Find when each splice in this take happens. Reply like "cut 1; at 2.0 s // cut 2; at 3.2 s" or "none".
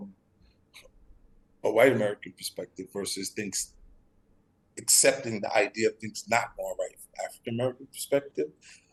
none